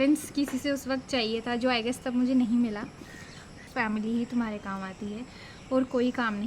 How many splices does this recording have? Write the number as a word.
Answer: one